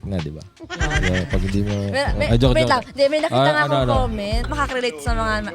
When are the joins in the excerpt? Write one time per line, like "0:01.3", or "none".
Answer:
0:04.4